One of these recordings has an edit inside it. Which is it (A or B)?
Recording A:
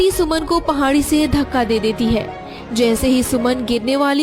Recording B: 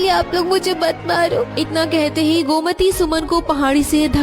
B